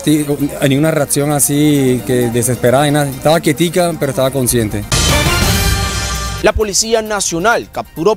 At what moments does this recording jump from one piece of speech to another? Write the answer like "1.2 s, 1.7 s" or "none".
4.8 s, 6.2 s